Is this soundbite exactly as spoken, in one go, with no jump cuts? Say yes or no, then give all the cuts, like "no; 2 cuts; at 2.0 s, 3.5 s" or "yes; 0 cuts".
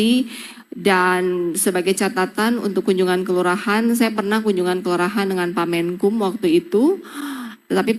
yes; 0 cuts